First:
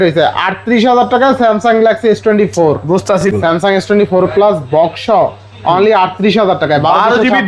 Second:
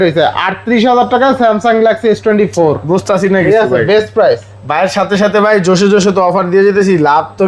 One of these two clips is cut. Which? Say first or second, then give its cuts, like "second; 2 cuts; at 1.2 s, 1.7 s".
first; 1 cut; at 3.2 s